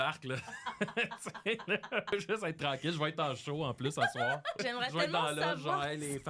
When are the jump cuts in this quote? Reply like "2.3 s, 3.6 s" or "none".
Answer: 2.1 s, 4.6 s